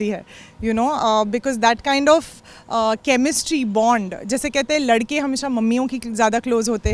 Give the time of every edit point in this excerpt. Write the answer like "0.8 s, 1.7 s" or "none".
none